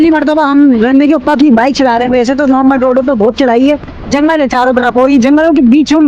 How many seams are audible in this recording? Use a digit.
1